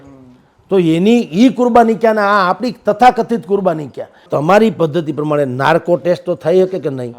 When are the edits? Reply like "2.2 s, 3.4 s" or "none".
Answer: 4.2 s